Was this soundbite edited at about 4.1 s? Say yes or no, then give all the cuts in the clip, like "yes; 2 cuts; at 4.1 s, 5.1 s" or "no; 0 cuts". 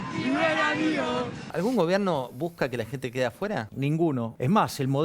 yes; 2 cuts; at 1.4 s, 4.1 s